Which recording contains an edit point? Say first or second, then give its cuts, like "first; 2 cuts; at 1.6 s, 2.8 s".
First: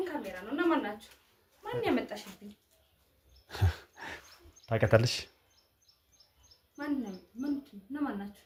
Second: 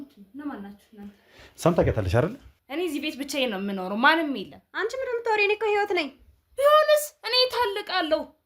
second; 1 cut; at 2.5 s